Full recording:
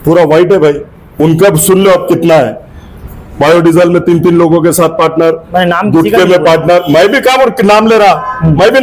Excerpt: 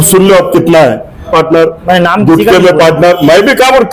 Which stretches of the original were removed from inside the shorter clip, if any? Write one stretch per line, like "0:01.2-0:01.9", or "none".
0:02.8-0:04.9